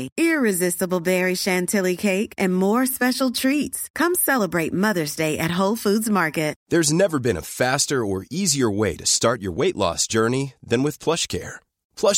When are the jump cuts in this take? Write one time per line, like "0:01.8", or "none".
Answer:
0:06.6